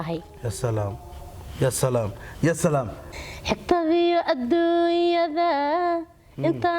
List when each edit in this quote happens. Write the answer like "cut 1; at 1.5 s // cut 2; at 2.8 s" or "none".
cut 1; at 3.1 s